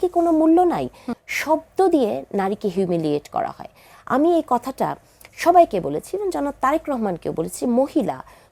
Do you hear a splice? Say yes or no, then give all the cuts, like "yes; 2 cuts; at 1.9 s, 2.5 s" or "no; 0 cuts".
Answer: yes; 1 cut; at 1.1 s